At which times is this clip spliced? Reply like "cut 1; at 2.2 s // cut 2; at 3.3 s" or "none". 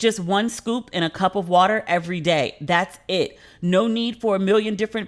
none